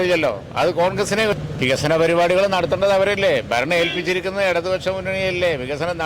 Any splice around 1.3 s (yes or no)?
yes